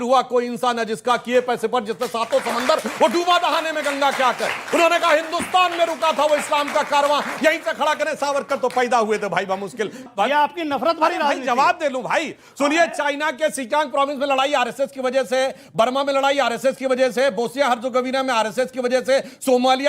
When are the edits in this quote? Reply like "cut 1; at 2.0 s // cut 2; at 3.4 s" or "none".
cut 1; at 10.1 s